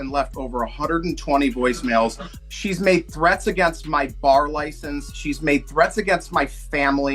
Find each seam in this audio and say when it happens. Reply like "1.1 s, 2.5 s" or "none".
2.3 s